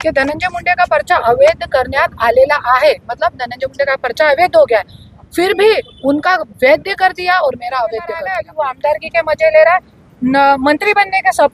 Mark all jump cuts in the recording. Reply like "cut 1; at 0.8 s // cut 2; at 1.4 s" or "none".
cut 1; at 8.4 s

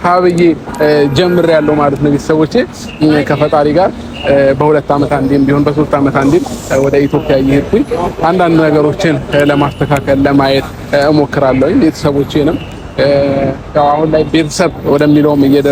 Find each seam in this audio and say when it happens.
none

